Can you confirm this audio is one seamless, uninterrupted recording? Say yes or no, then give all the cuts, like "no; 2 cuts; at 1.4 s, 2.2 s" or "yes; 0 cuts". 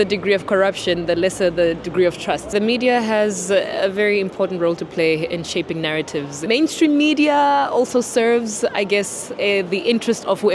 no; 2 cuts; at 2.5 s, 6.3 s